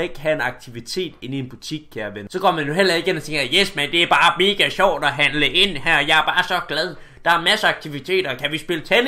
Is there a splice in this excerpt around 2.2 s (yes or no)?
yes